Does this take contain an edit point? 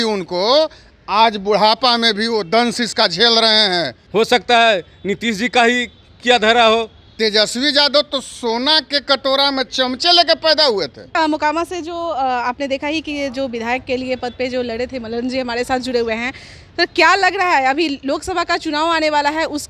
yes; 3 cuts; at 4.0 s, 7.0 s, 11.2 s

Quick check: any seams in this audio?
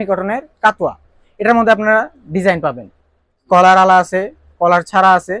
no; 0 cuts

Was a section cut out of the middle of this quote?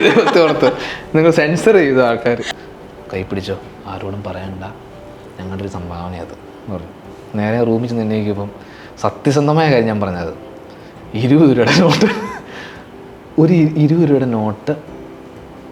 yes; 1 cut; at 2.4 s

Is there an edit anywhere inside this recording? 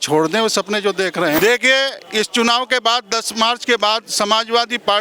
yes; 1 cut; at 1.4 s

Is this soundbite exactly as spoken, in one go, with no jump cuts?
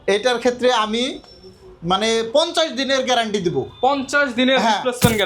yes; 0 cuts

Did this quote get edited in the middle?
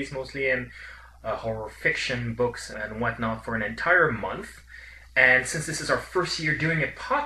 no; 0 cuts

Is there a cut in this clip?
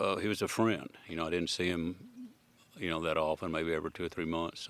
no; 0 cuts

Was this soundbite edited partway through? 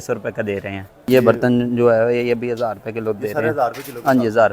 yes; 1 cut; at 1.1 s

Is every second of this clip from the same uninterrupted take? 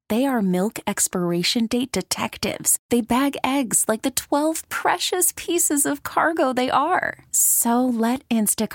yes; 0 cuts

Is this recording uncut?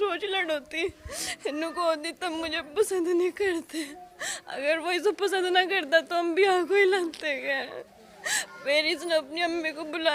yes; 0 cuts

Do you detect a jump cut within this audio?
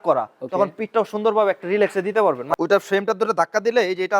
yes; 1 cut; at 2.5 s

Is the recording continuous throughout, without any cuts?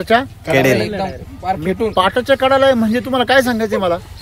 yes; 0 cuts

